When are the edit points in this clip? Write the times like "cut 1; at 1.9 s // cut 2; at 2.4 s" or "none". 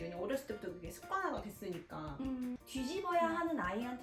cut 1; at 2.6 s

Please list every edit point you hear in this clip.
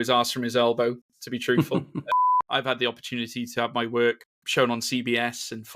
cut 1; at 2.1 s // cut 2; at 4.3 s

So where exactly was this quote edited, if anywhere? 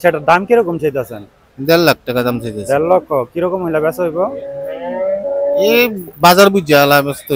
none

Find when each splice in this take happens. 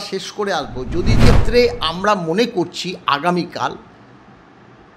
cut 1; at 1.2 s

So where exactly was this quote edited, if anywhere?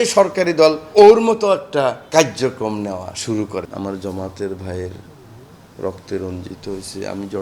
cut 1; at 0.9 s // cut 2; at 2.0 s // cut 3; at 3.7 s

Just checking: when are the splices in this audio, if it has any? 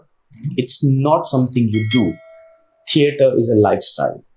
none

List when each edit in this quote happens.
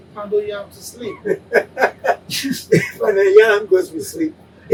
none

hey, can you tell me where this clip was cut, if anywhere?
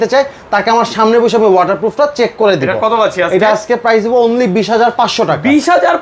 none

